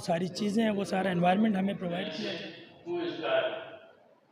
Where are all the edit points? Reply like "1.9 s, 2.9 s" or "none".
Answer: 2.1 s